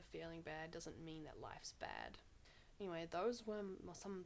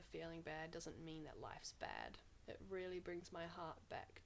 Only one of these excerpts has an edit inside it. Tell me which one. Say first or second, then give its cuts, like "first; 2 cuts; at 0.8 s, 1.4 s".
second; 1 cut; at 2.3 s